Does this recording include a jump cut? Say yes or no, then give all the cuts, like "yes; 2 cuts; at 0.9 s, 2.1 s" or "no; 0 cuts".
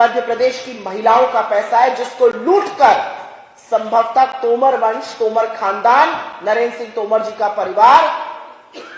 no; 0 cuts